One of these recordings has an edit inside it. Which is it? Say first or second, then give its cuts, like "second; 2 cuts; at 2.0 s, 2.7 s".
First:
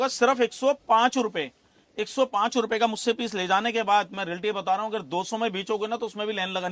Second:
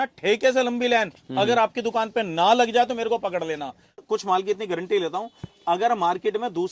second; 1 cut; at 4.0 s